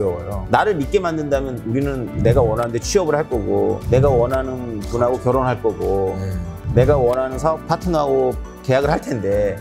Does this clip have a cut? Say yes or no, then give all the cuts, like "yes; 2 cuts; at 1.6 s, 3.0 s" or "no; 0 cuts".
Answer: no; 0 cuts